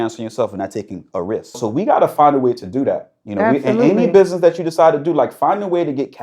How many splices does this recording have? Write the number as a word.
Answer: one